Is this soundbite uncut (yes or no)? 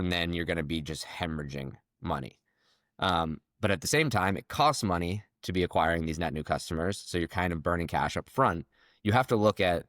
yes